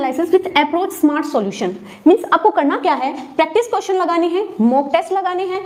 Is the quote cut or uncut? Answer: uncut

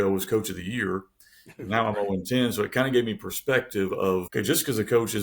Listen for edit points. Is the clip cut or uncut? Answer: cut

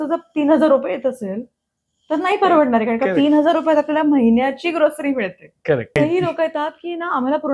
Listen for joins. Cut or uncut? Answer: cut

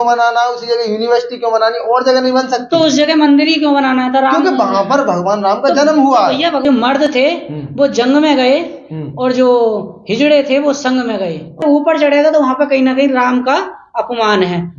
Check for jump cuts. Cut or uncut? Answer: cut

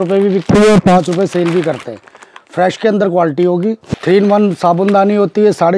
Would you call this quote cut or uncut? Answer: cut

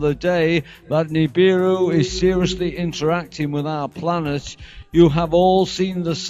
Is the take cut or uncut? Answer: cut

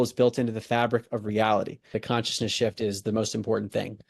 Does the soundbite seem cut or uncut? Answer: cut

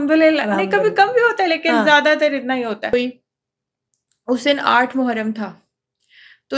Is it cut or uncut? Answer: cut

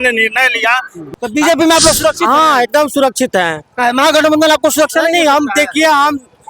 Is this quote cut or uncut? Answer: cut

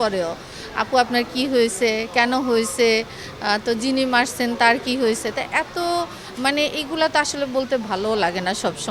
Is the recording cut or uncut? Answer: uncut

